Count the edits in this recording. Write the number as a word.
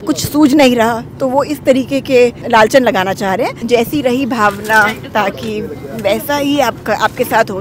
two